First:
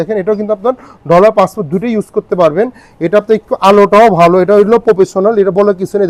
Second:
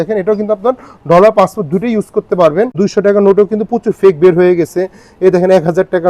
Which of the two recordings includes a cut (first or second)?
second